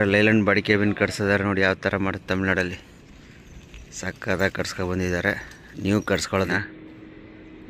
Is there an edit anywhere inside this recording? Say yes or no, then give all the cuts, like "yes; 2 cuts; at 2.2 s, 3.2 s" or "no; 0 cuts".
yes; 1 cut; at 6.5 s